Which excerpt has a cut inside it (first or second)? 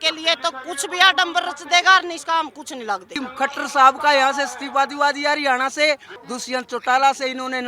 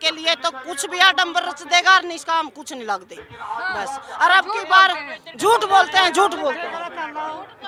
first